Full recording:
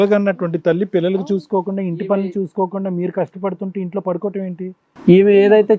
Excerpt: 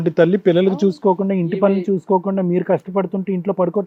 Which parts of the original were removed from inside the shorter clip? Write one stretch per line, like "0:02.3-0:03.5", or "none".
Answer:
none